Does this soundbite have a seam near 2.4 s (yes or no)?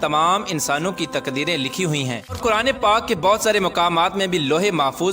yes